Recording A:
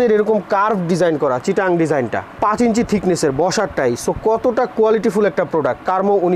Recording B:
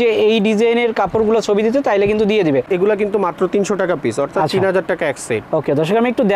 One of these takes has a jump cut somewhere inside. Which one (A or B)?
B